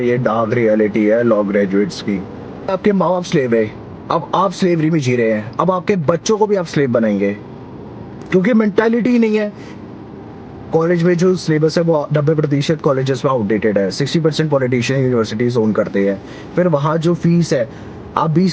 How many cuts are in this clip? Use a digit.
2